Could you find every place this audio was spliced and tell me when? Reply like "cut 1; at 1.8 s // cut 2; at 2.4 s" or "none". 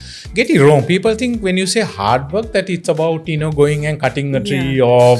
none